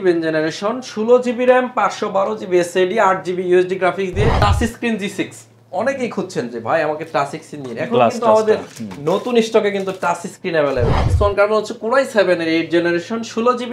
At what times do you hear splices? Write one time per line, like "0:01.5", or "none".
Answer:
0:04.4
0:11.0